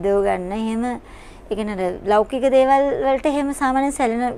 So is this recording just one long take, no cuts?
yes; 0 cuts

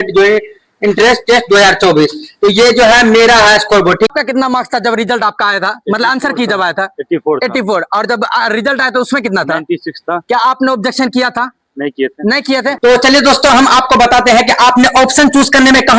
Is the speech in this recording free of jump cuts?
no; 2 cuts; at 4.1 s, 12.7 s

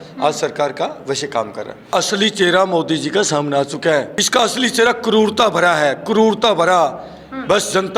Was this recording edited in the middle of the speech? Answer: yes; 2 cuts; at 1.9 s, 4.2 s

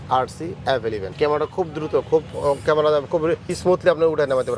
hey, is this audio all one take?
no; 2 cuts; at 1.1 s, 3.5 s

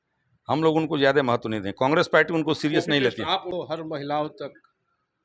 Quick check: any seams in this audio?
yes; 1 cut; at 3.5 s

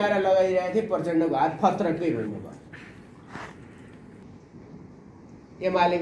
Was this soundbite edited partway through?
yes; 1 cut; at 4.1 s

